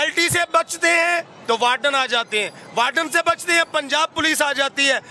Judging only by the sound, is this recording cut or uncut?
uncut